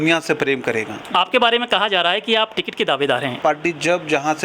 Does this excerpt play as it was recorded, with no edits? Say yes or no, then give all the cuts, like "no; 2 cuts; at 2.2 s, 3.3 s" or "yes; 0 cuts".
no; 2 cuts; at 1.0 s, 3.4 s